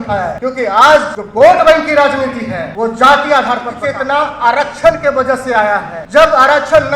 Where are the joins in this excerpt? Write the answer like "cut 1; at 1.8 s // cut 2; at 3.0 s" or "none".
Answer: cut 1; at 0.8 s // cut 2; at 2.7 s // cut 3; at 3.8 s // cut 4; at 6.0 s